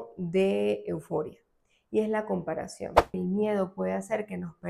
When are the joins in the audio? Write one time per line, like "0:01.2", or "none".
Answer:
0:03.1